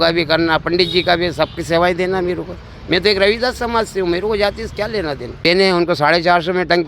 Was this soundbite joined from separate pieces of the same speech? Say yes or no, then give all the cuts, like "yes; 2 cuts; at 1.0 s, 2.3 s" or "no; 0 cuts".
yes; 1 cut; at 5.4 s